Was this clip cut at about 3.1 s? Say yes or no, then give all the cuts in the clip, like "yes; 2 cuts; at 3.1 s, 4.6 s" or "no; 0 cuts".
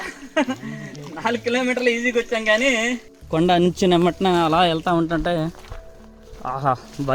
yes; 1 cut; at 3.1 s